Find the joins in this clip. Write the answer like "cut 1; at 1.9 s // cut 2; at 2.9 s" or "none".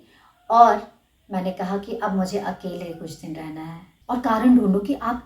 cut 1; at 3.9 s